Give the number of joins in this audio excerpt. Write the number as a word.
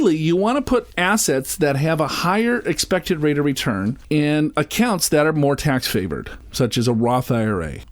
two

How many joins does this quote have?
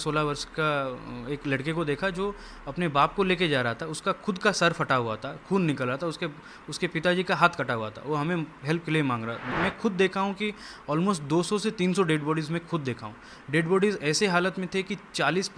one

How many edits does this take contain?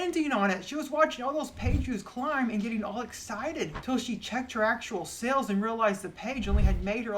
one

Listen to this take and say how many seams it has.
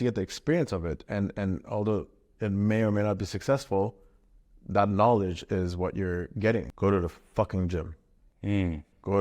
one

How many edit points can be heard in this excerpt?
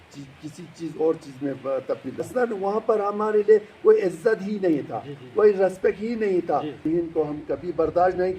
two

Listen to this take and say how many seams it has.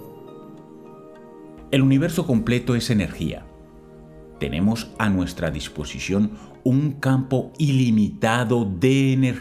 one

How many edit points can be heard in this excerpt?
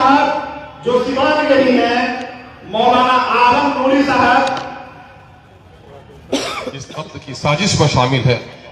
one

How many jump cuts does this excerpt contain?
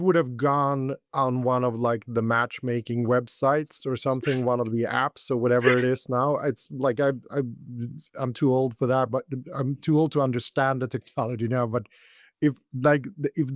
zero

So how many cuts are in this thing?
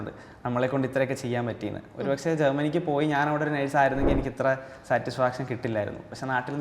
zero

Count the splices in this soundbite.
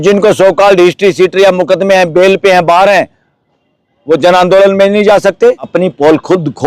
one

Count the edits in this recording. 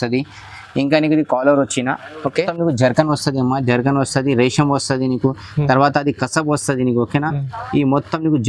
one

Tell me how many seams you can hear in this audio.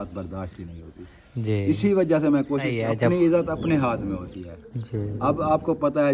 one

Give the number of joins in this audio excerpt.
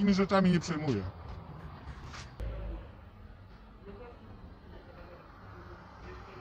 one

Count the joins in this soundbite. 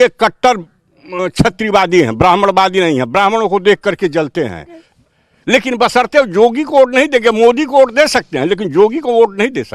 one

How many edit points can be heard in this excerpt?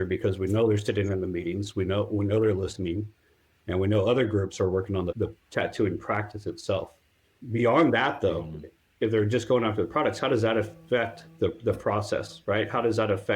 one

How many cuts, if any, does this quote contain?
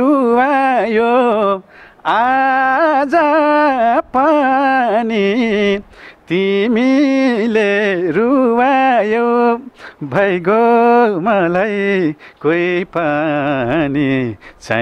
zero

